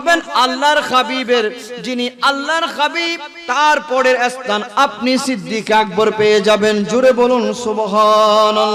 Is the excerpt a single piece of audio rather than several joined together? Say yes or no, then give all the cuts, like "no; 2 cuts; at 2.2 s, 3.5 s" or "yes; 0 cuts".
yes; 0 cuts